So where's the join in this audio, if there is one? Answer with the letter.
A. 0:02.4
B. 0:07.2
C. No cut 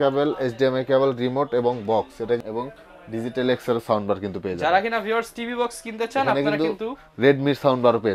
A